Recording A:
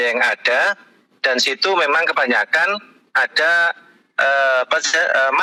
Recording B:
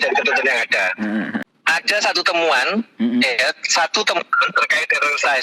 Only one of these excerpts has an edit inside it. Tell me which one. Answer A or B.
B